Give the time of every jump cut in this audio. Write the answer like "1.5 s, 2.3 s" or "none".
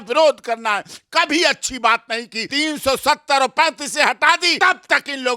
2.4 s, 4.5 s